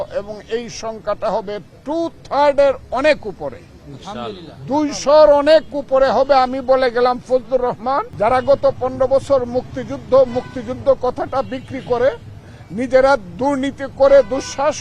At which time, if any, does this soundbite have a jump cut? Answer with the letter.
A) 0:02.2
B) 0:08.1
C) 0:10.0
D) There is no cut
B